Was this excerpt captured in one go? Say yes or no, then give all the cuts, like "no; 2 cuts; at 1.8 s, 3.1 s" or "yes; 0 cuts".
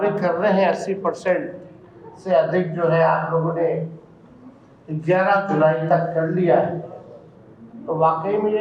yes; 0 cuts